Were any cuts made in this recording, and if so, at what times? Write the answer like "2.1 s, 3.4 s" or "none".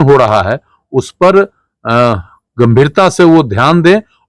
none